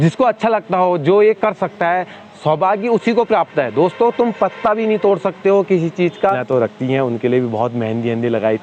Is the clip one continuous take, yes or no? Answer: no